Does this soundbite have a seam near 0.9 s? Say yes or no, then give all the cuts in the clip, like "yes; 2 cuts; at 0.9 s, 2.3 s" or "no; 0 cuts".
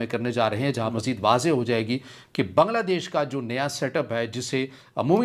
yes; 1 cut; at 0.9 s